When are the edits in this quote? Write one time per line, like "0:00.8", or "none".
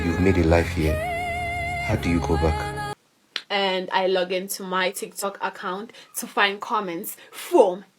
0:02.9